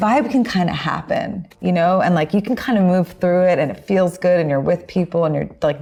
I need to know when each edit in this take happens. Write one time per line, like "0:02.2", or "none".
none